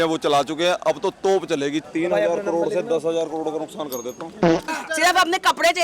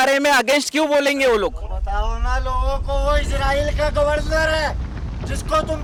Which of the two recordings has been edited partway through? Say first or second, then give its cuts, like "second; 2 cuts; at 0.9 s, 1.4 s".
first; 2 cuts; at 1.8 s, 4.7 s